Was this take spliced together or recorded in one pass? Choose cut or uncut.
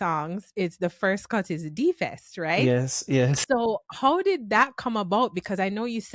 uncut